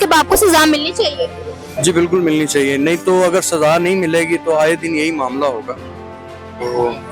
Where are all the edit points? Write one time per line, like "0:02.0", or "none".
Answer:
none

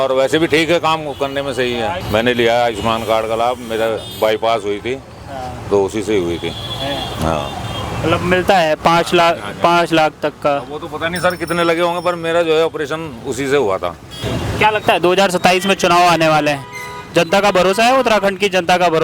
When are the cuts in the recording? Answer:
0:02.0
0:14.2

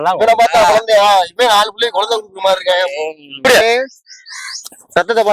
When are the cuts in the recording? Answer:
0:03.4

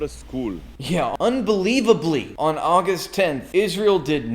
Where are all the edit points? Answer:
0:00.9
0:02.3
0:03.4

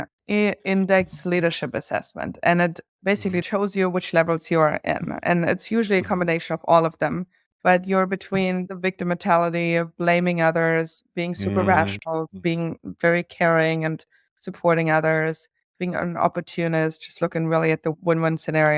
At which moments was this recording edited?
0:03.4
0:12.3
0:17.9

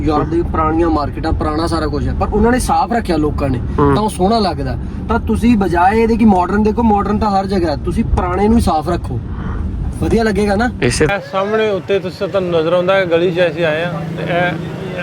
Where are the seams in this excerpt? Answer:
0:11.1

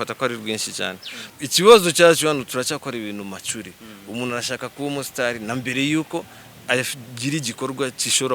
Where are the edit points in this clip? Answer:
0:01.2

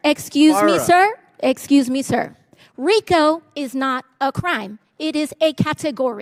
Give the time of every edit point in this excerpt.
none

